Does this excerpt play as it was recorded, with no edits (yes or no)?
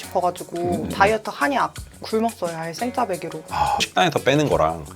no